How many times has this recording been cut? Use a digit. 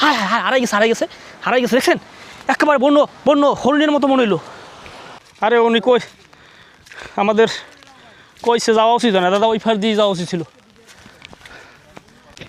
0